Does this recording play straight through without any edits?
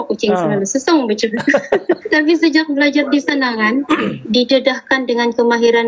no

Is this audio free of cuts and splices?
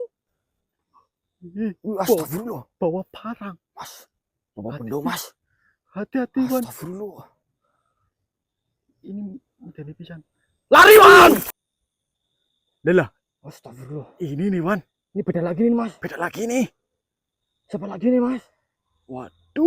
no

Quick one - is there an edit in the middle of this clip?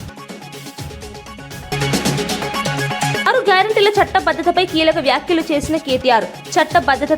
yes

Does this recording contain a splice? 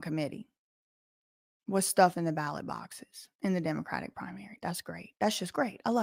no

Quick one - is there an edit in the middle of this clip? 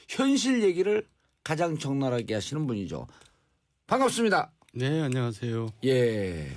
no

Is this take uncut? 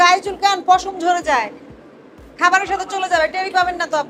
yes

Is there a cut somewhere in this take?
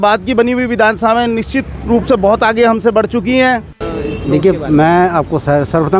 yes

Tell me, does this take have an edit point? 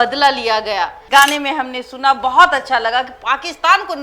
yes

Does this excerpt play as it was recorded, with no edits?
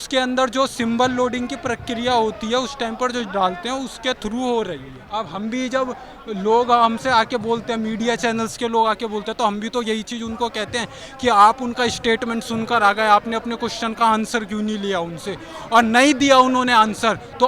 no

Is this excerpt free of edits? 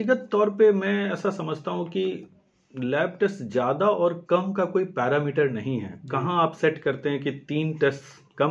yes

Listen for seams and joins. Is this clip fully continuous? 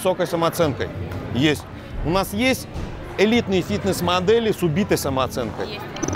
yes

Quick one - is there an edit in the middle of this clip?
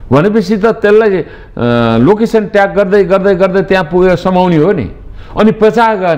no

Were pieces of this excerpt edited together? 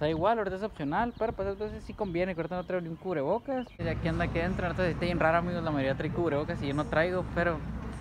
yes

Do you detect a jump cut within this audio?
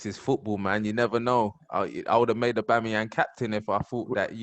no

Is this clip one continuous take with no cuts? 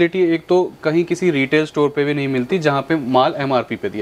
yes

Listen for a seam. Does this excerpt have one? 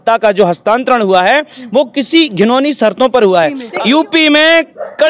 yes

